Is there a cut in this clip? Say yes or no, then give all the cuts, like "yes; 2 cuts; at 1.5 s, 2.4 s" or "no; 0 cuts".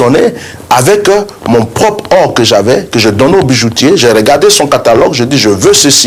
no; 0 cuts